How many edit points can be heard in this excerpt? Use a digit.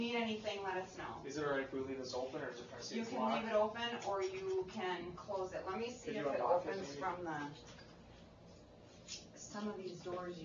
1